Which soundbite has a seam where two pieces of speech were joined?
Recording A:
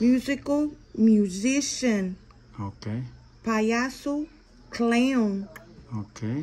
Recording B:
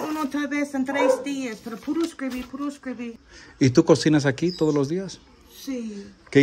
B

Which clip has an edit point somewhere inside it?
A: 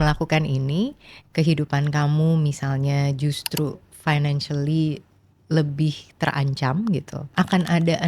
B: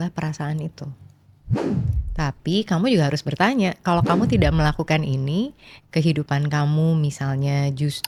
A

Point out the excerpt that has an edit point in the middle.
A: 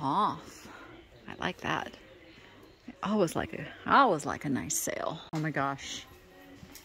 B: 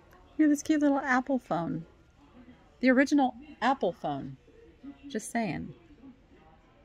A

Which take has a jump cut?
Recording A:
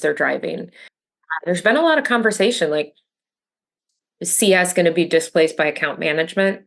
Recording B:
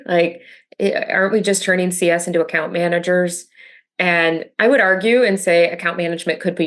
A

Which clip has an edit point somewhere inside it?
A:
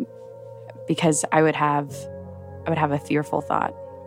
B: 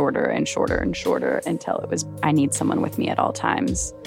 B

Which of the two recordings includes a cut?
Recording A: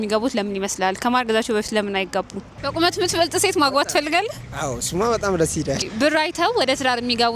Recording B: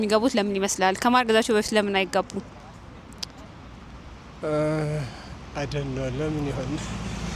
A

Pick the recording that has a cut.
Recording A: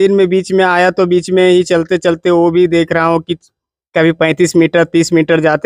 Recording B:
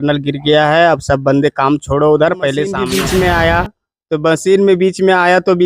B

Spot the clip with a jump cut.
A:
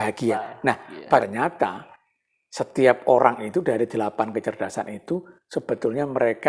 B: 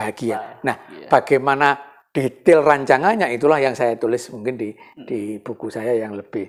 A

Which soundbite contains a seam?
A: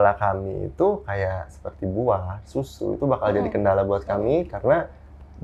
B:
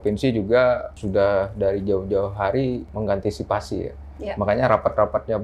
B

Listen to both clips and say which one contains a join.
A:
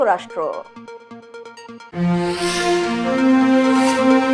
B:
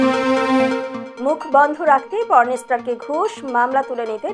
B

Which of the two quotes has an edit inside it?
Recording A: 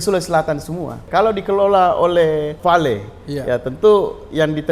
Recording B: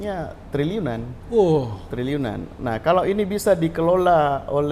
A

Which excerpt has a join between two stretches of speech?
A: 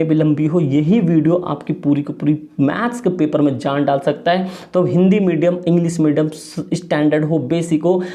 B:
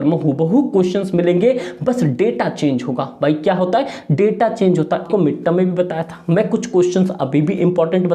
B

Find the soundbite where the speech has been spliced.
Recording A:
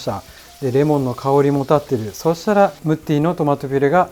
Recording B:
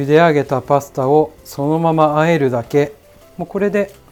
A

